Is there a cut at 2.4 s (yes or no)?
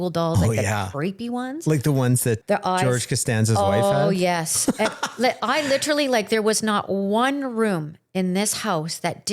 yes